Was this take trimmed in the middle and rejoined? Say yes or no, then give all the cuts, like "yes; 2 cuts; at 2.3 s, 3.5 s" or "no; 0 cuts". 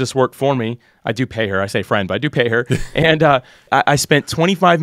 yes; 1 cut; at 3.7 s